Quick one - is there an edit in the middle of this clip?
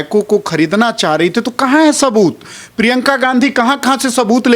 no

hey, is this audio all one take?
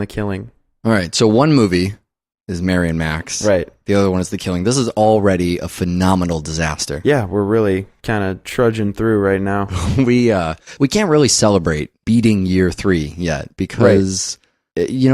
no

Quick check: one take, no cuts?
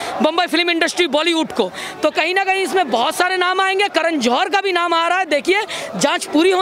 yes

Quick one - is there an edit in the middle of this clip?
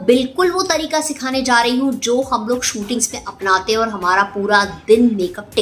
no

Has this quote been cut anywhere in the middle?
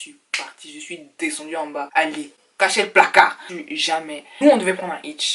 yes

